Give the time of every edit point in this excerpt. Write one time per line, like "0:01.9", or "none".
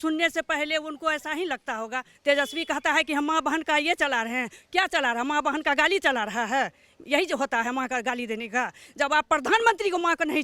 0:02.1